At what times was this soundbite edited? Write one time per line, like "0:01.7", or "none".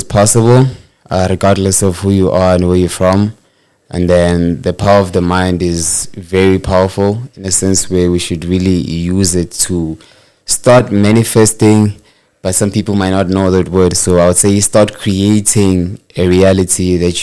none